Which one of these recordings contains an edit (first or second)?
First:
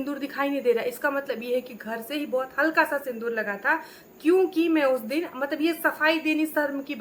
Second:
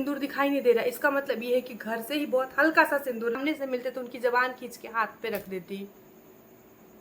second